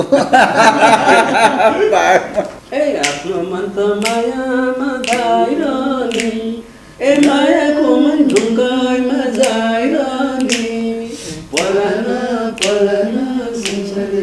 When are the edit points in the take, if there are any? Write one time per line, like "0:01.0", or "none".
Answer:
0:02.6